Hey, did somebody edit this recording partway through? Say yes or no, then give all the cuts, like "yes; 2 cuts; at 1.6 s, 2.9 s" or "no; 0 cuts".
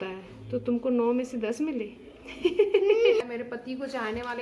yes; 1 cut; at 3.2 s